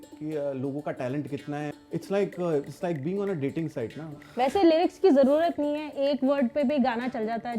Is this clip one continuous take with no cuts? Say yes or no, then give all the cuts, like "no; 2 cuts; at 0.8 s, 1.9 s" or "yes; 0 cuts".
no; 2 cuts; at 1.7 s, 4.2 s